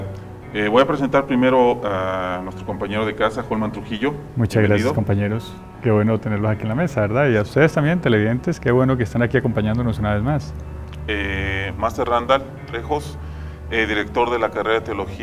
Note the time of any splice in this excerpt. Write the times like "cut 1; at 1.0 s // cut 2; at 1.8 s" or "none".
cut 1; at 9.4 s